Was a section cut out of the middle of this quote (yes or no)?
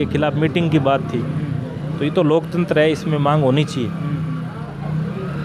no